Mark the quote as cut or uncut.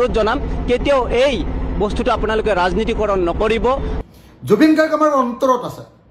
cut